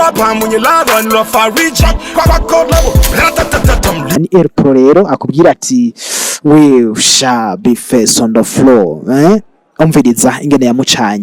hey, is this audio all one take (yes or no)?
no